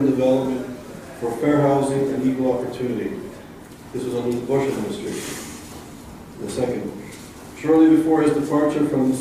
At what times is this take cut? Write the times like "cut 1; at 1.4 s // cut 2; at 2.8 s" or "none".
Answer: none